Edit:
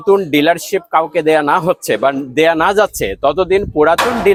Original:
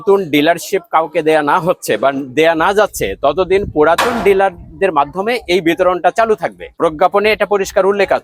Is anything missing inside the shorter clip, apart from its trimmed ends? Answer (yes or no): no